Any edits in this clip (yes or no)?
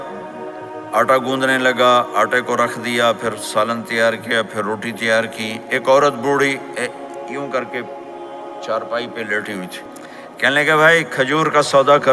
yes